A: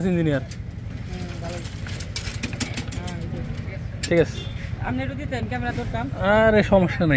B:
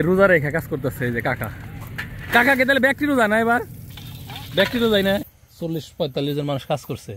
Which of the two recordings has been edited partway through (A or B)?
B